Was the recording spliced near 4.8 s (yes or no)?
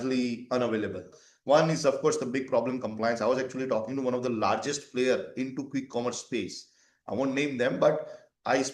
no